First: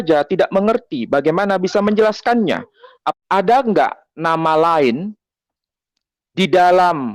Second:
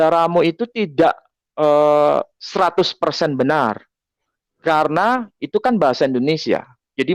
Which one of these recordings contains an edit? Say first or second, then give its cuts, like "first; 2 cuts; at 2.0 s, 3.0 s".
first; 1 cut; at 3.0 s